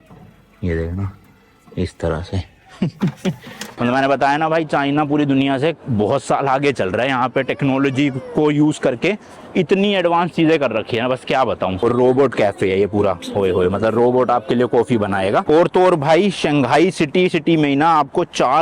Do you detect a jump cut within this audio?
yes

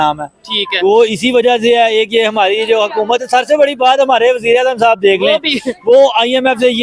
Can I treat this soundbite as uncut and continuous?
yes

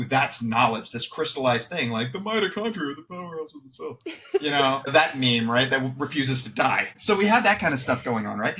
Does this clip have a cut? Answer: yes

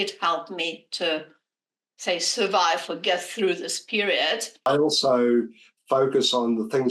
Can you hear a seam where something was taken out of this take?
yes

